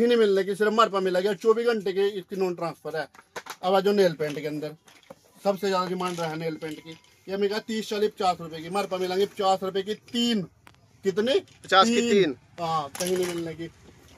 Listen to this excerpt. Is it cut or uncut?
uncut